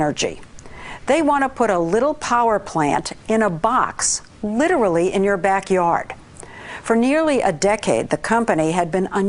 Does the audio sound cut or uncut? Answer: cut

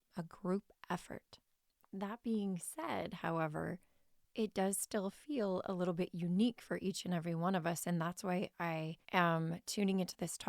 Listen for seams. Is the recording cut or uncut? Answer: cut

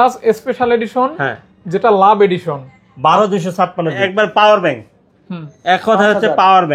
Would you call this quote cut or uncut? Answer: cut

